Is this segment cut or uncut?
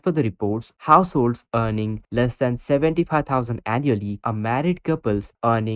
cut